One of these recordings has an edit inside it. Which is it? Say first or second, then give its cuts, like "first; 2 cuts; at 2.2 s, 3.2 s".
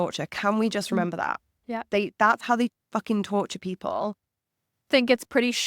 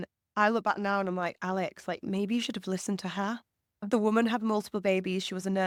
first; 1 cut; at 4.4 s